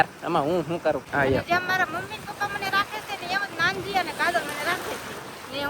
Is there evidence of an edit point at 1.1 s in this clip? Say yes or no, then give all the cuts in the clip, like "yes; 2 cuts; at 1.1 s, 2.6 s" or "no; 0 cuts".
yes; 1 cut; at 1.1 s